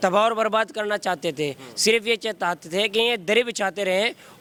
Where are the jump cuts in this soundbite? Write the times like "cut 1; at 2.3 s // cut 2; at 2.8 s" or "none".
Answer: none